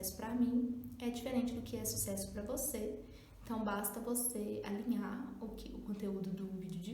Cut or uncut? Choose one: uncut